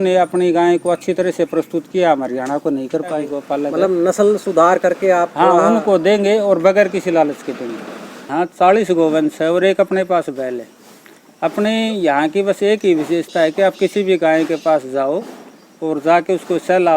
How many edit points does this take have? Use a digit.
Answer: 2